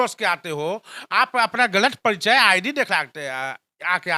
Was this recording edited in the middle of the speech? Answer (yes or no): no